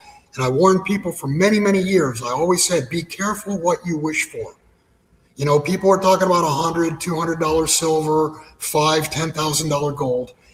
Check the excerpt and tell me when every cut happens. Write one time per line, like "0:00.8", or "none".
none